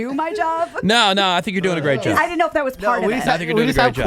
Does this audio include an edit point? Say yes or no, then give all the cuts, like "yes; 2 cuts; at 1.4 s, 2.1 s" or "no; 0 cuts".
yes; 1 cut; at 2.2 s